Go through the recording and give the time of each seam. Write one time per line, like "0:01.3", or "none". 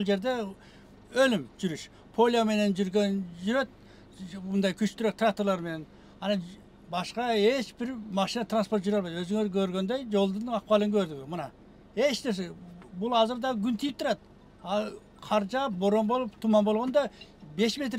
none